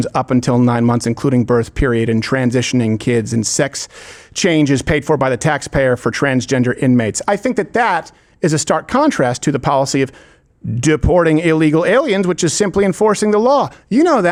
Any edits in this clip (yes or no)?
no